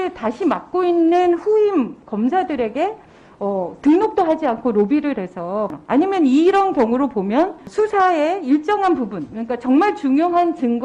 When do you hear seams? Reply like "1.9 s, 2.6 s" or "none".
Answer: 5.7 s, 7.6 s